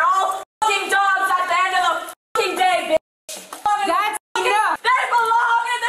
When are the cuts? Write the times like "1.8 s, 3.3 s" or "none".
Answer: 3.7 s, 4.8 s